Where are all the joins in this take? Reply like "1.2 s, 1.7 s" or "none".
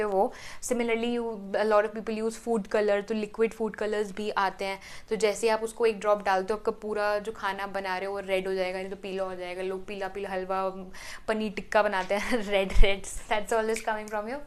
none